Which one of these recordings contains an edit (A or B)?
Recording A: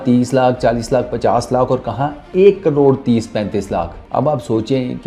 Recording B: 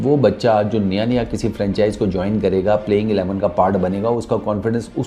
A